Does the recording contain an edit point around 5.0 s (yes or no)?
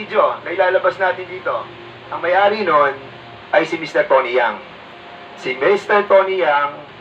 no